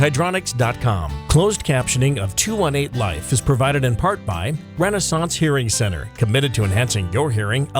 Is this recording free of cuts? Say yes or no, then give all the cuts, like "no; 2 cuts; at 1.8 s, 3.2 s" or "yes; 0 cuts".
no; 1 cut; at 1.1 s